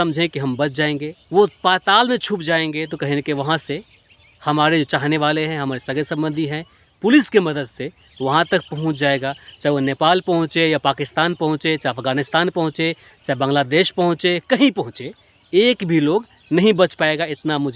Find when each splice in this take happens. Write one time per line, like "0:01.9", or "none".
0:01.1